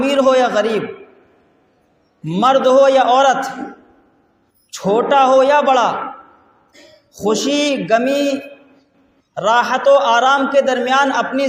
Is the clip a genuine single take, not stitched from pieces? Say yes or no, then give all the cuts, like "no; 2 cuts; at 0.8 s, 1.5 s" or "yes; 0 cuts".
yes; 0 cuts